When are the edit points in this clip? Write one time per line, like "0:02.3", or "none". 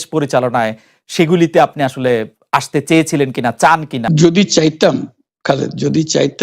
0:04.0